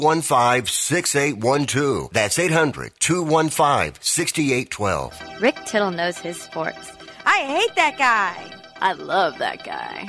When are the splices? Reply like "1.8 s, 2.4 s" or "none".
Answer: 5.1 s

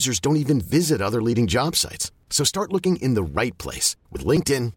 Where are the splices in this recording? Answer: none

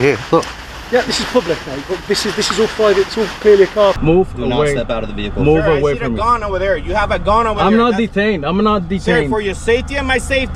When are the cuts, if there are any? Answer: 4.0 s

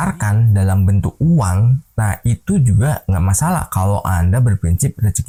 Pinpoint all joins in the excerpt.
none

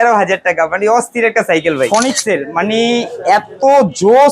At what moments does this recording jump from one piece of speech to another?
1.9 s

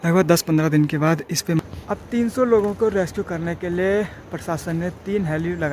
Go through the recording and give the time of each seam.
1.6 s

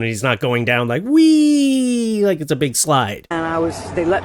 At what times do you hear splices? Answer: 3.3 s

